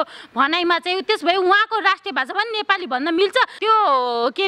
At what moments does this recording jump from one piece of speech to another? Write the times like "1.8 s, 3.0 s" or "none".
3.5 s

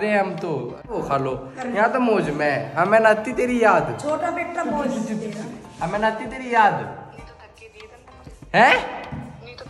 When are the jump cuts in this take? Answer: 0.9 s

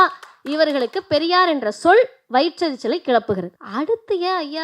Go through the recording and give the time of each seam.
3.6 s

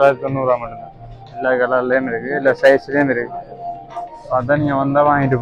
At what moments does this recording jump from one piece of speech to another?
none

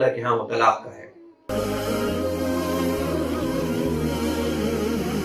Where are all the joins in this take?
1.4 s

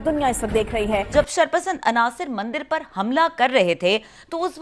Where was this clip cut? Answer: 1.1 s

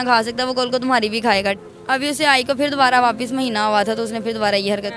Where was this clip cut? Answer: 1.6 s

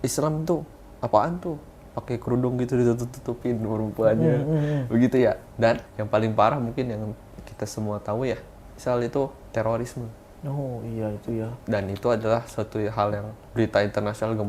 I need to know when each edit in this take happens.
5.9 s, 9.4 s, 13.4 s

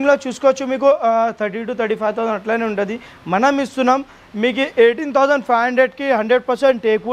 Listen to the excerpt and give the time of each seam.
none

